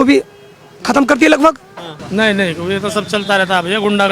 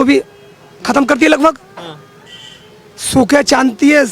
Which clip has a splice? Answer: first; 1 cut; at 2.0 s

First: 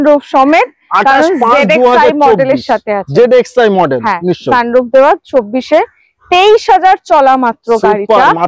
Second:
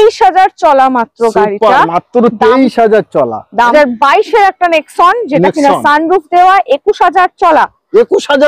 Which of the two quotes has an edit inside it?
second; 1 cut; at 3.7 s

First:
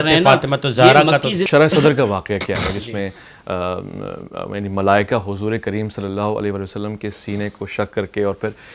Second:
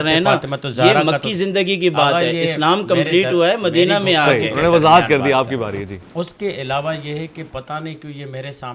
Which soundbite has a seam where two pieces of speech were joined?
first; 1 cut; at 1.4 s

